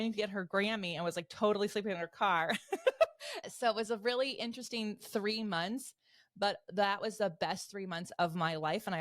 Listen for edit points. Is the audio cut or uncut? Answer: cut